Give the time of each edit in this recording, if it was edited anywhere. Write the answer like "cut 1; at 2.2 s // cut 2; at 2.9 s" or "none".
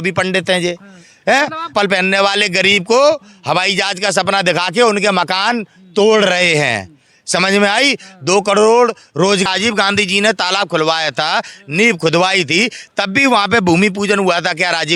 cut 1; at 1.7 s // cut 2; at 9.5 s